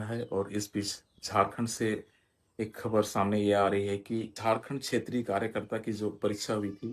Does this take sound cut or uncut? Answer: cut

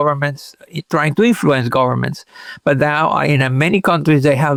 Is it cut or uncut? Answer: uncut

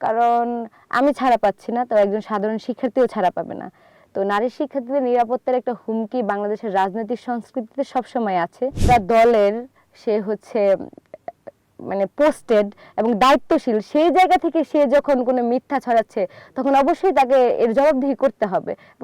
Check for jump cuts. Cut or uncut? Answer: cut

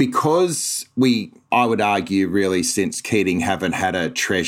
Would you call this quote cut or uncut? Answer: cut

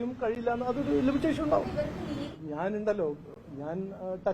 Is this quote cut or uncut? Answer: cut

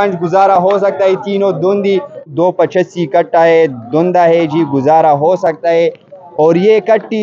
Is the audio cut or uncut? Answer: cut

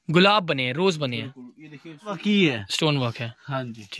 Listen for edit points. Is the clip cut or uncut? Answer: cut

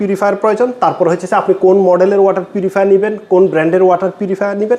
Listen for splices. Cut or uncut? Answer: uncut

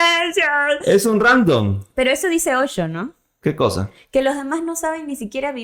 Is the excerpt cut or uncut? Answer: uncut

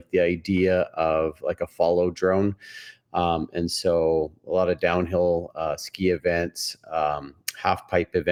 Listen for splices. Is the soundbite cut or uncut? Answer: uncut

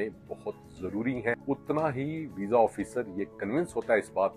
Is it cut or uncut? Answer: cut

